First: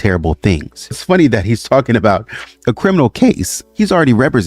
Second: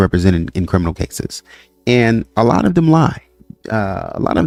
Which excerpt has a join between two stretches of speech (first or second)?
first